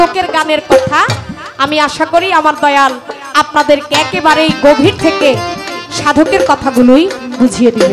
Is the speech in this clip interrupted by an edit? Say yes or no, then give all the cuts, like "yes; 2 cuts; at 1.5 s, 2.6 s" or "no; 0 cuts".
no; 0 cuts